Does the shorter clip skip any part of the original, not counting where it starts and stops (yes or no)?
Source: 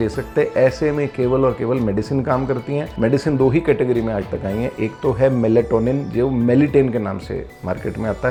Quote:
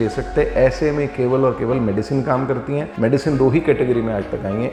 no